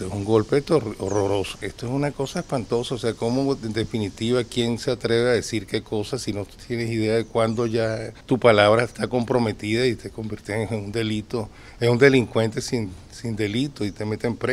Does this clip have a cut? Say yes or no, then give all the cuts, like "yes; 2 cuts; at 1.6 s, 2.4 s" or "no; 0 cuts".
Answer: yes; 2 cuts; at 1.5 s, 8.1 s